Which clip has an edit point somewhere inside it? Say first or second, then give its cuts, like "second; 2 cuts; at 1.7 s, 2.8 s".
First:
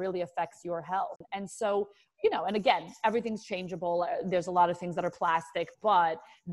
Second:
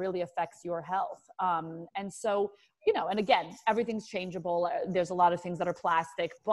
first; 1 cut; at 1.2 s